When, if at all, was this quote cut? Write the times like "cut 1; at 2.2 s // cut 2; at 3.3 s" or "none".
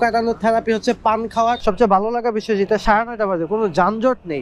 cut 1; at 1.6 s